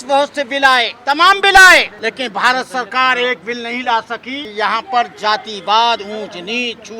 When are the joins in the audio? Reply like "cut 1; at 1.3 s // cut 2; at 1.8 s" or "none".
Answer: cut 1; at 0.9 s // cut 2; at 1.9 s // cut 3; at 4.4 s